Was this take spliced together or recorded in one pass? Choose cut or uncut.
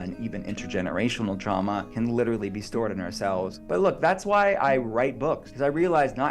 cut